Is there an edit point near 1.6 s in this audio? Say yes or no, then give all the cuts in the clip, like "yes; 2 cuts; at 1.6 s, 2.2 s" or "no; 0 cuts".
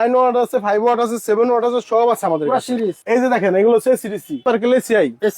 no; 2 cuts; at 3.0 s, 4.4 s